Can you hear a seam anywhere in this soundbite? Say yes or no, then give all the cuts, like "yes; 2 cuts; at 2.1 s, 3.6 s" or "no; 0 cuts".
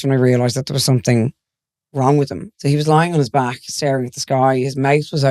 yes; 1 cut; at 2.4 s